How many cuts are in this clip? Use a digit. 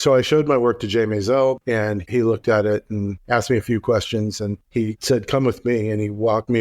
3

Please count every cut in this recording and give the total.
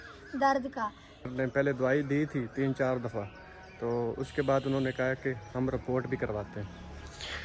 1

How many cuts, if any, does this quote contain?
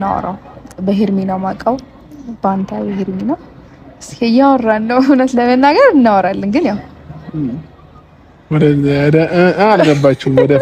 0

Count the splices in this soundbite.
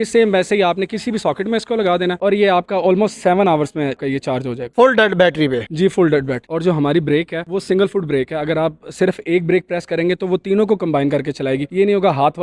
1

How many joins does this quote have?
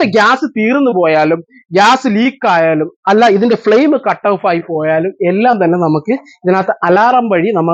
0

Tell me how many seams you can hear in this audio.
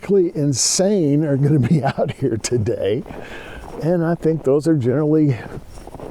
0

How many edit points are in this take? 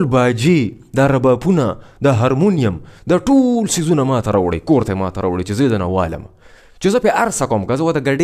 0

